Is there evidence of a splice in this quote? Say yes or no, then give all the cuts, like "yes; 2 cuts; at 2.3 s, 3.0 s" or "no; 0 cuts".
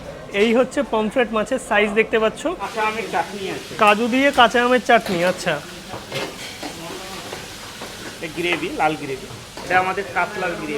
yes; 1 cut; at 2.7 s